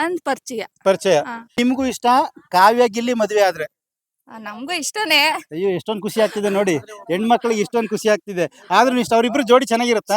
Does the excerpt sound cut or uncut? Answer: cut